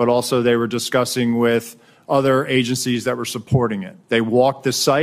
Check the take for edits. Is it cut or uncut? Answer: cut